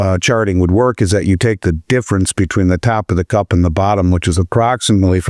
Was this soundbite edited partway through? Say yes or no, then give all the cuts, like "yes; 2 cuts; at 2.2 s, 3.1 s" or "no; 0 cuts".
no; 0 cuts